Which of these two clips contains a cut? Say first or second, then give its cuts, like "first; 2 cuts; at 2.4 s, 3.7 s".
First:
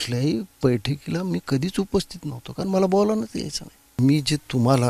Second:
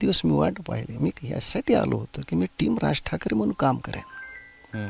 first; 1 cut; at 3.8 s